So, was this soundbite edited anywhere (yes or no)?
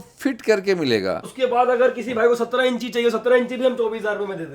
no